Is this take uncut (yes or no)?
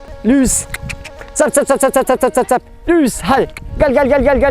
yes